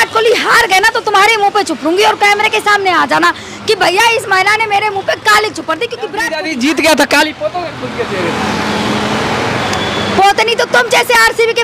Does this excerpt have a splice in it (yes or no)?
yes